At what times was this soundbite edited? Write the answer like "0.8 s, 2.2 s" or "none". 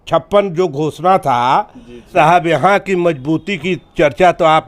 2.1 s